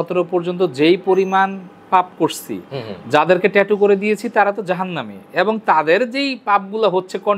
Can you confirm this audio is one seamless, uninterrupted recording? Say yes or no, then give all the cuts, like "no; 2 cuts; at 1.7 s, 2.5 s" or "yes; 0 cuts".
yes; 0 cuts